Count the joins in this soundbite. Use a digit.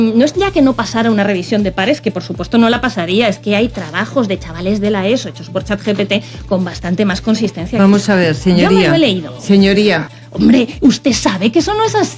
1